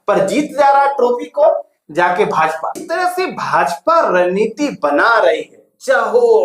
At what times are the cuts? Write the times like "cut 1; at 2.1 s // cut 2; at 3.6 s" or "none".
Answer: cut 1; at 2.8 s